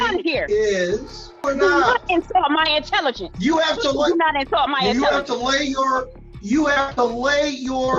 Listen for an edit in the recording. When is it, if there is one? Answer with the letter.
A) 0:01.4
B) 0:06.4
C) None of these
A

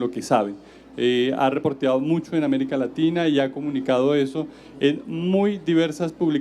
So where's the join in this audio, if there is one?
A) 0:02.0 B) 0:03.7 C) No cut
B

